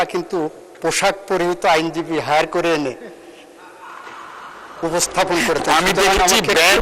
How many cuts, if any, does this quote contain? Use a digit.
0